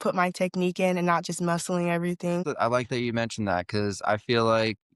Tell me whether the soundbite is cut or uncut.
uncut